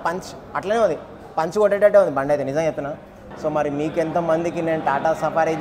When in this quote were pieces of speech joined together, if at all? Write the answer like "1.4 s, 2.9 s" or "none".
3.2 s